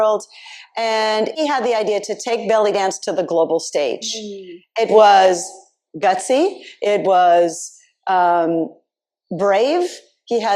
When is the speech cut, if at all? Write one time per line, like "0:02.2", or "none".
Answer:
0:01.3